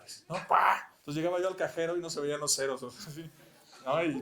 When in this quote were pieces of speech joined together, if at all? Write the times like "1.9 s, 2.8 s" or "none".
0.9 s